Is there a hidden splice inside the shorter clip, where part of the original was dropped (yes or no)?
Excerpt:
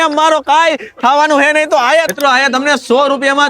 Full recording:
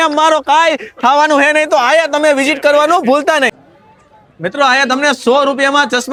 yes